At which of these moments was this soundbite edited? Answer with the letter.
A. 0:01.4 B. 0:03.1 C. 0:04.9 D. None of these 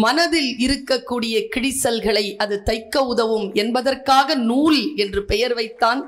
D